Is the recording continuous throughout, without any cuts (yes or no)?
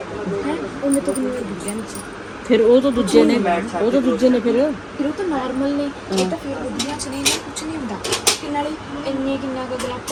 yes